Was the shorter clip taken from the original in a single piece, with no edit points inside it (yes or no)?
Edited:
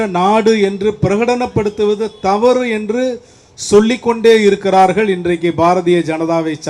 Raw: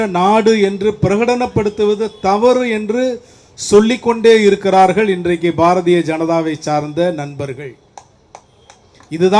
yes